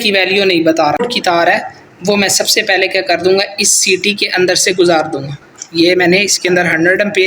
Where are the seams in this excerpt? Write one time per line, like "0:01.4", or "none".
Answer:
0:01.0

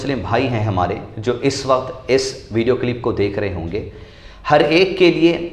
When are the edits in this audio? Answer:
none

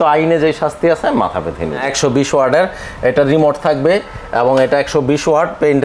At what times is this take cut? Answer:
0:01.8

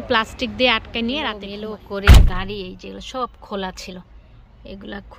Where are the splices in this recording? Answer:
0:01.4

